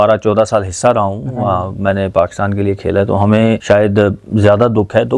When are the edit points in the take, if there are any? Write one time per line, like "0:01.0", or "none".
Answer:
0:03.6